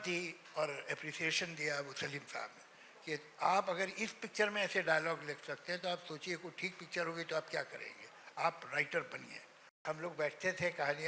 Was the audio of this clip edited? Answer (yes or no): yes